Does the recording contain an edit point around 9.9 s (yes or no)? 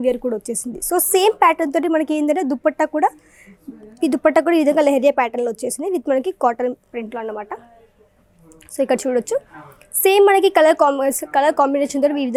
no